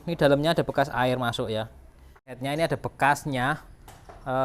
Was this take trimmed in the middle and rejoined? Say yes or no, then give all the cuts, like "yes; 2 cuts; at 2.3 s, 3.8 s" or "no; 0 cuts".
yes; 1 cut; at 2.3 s